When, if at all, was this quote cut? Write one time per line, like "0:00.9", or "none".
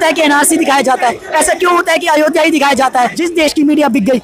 0:03.1